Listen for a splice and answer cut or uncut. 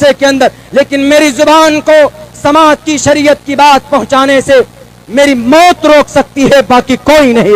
uncut